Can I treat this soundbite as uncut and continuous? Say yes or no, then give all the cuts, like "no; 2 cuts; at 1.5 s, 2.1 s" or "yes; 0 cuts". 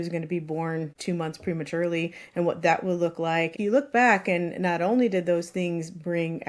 no; 2 cuts; at 0.9 s, 3.6 s